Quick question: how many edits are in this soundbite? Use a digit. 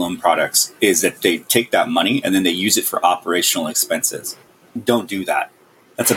2